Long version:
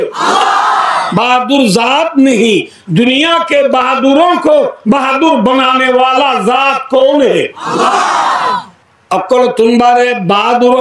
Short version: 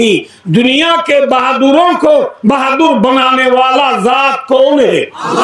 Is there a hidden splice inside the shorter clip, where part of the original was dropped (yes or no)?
no